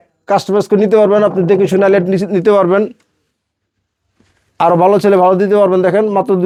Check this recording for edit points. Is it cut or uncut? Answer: uncut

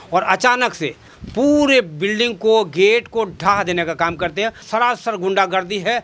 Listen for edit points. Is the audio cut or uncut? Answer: cut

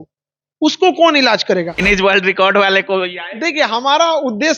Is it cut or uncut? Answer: cut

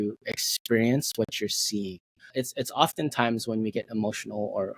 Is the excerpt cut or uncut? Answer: cut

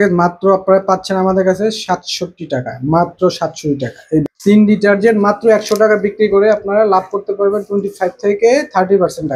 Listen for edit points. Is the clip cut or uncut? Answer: cut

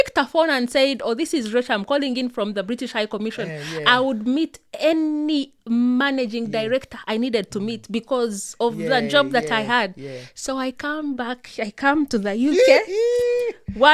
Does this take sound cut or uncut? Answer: uncut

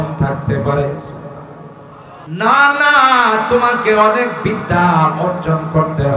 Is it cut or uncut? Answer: cut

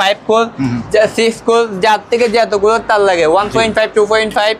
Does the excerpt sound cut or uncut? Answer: uncut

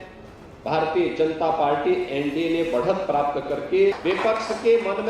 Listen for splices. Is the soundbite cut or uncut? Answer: cut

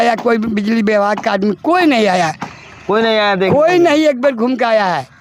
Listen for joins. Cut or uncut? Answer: uncut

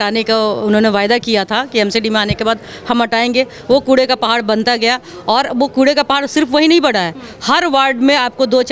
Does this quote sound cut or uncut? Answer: uncut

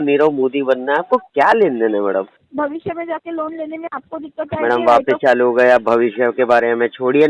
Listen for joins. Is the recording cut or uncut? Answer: cut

